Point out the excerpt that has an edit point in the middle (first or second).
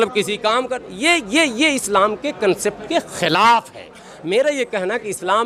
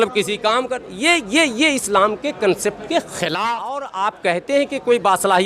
second